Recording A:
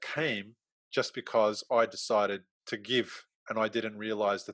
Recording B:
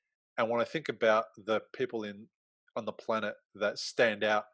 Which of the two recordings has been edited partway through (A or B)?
A